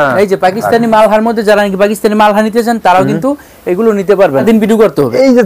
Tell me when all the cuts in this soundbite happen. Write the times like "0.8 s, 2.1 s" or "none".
4.4 s